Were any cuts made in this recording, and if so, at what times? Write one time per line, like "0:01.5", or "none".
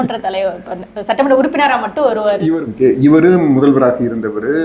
0:02.5